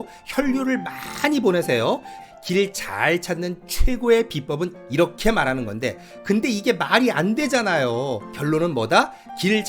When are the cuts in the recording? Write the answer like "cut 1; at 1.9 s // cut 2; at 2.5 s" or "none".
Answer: cut 1; at 2.2 s // cut 2; at 4.8 s // cut 3; at 8.3 s